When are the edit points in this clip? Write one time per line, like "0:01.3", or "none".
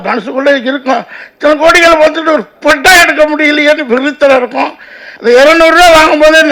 0:05.1